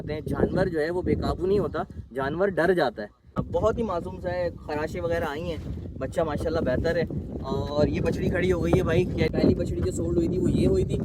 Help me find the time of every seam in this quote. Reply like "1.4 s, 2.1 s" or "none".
3.4 s, 9.3 s